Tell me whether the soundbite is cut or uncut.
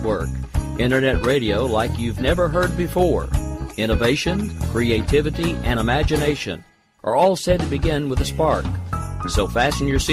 uncut